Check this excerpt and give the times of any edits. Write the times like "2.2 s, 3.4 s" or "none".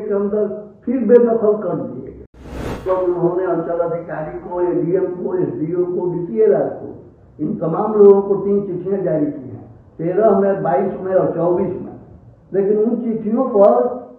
2.8 s

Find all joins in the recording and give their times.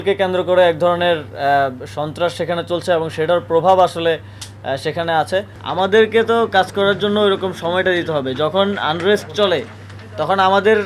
5.6 s

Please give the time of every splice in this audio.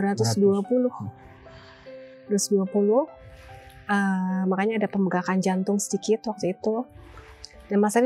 none

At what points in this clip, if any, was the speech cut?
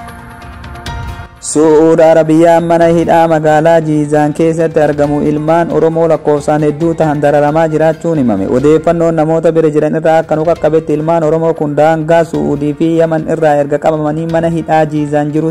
1.3 s

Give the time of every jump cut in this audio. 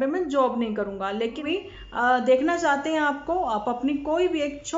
1.4 s

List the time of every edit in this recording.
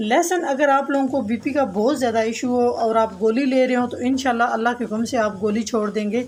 none

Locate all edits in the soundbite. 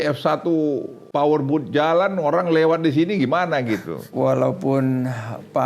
1.0 s, 4.1 s

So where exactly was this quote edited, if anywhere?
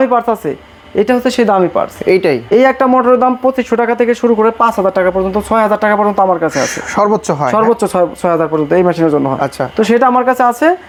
none

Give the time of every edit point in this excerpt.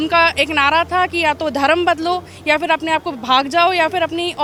none

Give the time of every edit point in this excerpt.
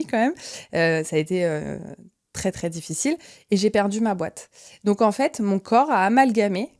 none

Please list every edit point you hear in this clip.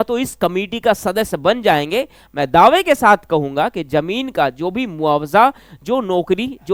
none

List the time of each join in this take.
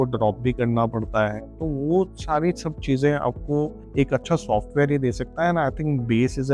3.8 s

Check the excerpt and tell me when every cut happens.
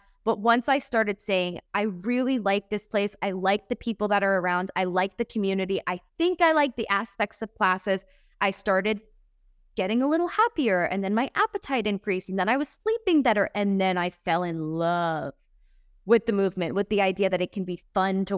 none

